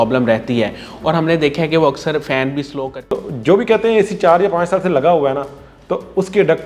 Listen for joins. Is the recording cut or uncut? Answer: cut